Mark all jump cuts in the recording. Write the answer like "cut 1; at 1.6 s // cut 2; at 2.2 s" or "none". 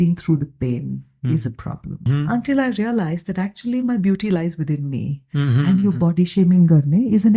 cut 1; at 2.1 s